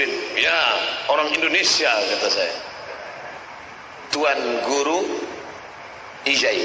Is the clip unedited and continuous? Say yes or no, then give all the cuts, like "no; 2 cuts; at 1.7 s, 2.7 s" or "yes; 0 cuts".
no; 1 cut; at 3.4 s